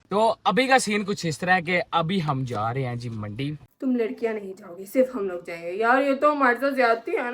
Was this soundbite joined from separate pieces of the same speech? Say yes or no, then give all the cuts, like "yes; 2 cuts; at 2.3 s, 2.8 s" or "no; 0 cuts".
yes; 1 cut; at 3.6 s